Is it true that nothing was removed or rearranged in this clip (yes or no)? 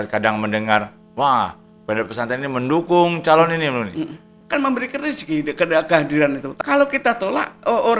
no